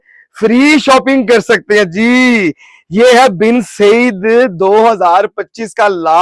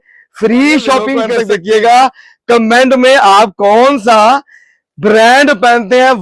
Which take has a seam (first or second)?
second